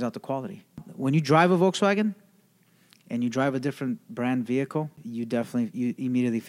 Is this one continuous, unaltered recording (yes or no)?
no